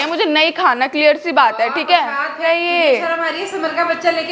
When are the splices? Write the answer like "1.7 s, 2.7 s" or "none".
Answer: 2.4 s

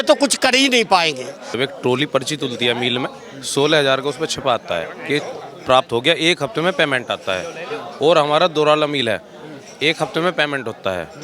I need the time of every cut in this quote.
1.5 s

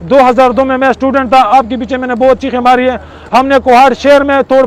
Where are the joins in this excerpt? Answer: none

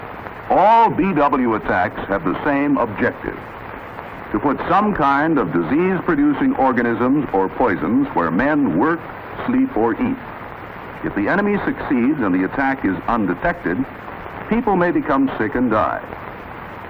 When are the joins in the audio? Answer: none

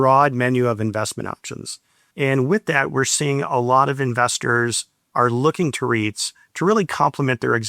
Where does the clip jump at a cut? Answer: none

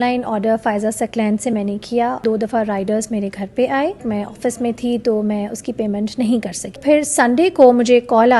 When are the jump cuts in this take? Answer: 2.2 s, 4.1 s, 6.8 s

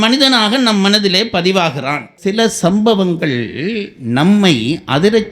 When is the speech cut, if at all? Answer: 2.1 s

